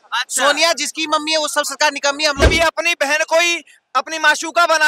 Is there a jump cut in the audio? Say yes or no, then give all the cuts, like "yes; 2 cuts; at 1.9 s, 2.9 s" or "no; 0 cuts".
yes; 1 cut; at 2.4 s